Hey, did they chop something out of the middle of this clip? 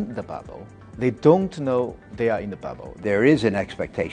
yes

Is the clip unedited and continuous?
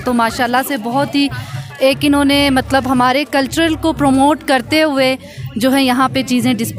yes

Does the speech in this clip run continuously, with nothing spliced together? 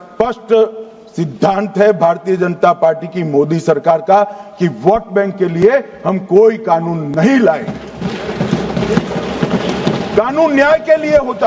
yes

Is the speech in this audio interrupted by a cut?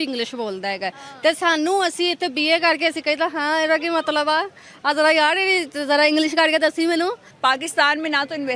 yes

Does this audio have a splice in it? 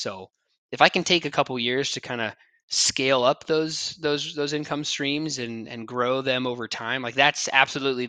no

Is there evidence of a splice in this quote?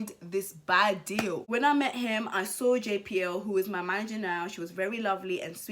no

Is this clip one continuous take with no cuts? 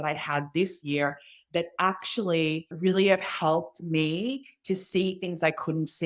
no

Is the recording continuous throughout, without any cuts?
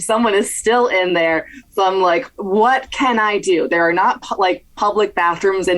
no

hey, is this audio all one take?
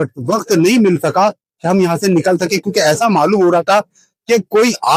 yes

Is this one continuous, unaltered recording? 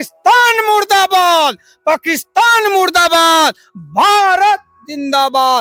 yes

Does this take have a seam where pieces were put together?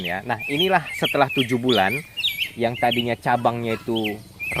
no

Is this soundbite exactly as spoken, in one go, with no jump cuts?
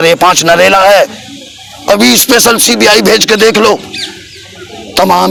yes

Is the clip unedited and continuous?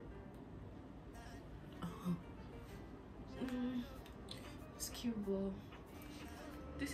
no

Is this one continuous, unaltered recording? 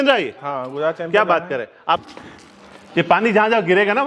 no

